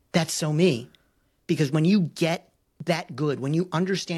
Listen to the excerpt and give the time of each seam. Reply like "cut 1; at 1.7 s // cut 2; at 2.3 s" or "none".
none